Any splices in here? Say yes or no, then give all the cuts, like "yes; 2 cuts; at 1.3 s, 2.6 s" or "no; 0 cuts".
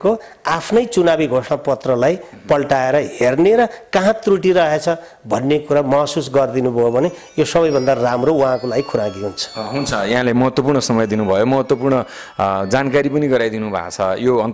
no; 0 cuts